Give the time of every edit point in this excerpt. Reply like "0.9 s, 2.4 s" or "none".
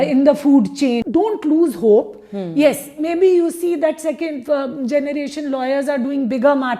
1.0 s